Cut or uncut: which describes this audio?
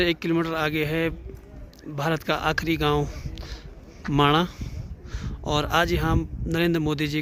uncut